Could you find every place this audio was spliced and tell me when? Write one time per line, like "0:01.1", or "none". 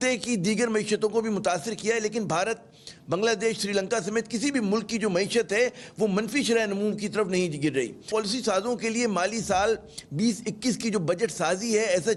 none